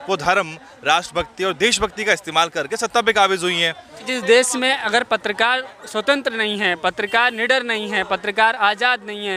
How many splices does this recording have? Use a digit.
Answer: 1